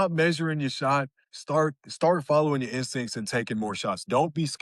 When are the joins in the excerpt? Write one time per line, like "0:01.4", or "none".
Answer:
none